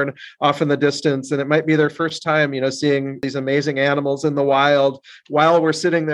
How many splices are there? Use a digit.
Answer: 1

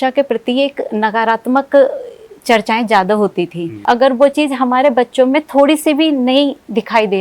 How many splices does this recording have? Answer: 1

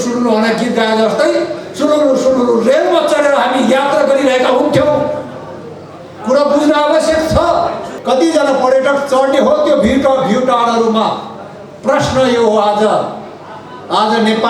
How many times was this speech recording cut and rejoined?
1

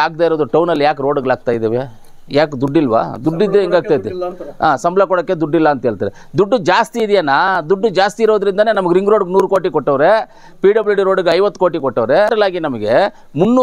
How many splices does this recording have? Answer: 1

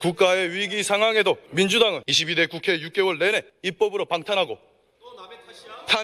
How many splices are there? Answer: 3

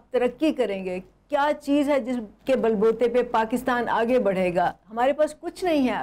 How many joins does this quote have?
0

